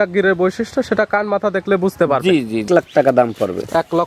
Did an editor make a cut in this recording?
yes; 1 cut; at 2.7 s

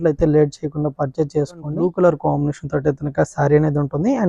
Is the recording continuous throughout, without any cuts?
no; 1 cut; at 1.7 s

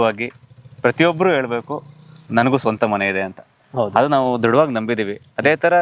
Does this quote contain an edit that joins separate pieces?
no; 0 cuts

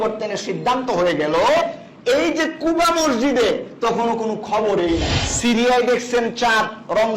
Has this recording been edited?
yes; 1 cut; at 5.2 s

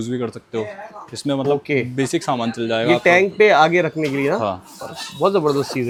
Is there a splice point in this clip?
no; 0 cuts

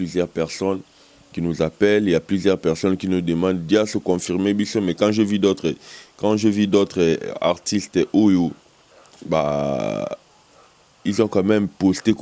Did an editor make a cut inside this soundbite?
no; 0 cuts

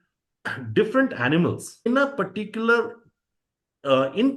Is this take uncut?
no; 1 cut; at 1.9 s

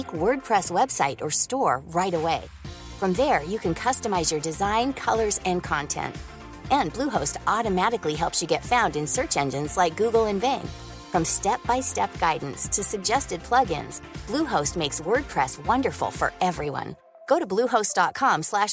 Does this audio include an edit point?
no; 0 cuts

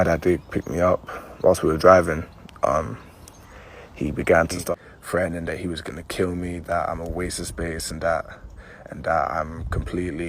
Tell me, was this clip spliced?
yes; 1 cut; at 4.6 s

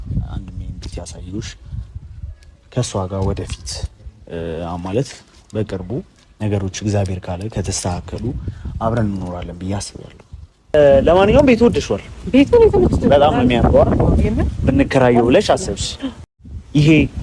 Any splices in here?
yes; 1 cut; at 10.7 s

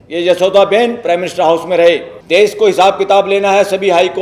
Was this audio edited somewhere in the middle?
yes; 1 cut; at 2.1 s

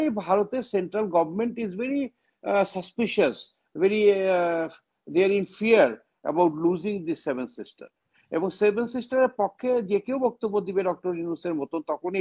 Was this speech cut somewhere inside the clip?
no; 0 cuts

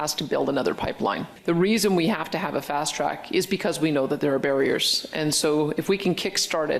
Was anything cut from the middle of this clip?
yes; 1 cut; at 1.3 s

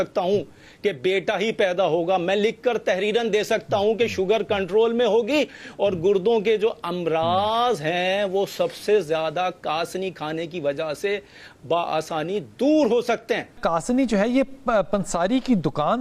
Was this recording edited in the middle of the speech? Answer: yes; 1 cut; at 13.6 s

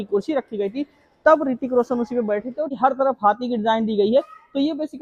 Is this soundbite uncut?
no; 1 cut; at 2.7 s

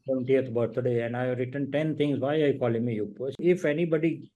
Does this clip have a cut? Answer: yes; 1 cut; at 3.3 s

